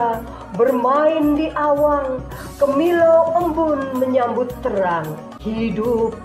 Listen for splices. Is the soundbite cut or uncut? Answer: cut